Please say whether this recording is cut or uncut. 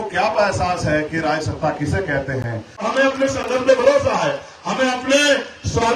cut